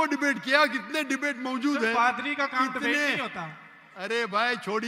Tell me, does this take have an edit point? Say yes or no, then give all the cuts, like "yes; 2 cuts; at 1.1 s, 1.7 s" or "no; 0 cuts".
no; 0 cuts